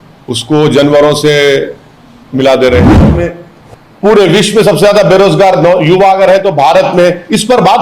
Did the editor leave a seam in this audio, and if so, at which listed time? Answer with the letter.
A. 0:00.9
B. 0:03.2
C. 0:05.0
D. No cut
B